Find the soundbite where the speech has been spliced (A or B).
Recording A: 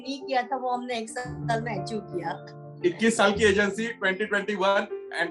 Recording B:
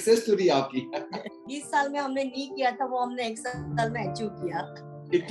B